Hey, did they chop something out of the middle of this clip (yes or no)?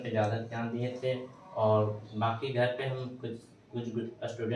no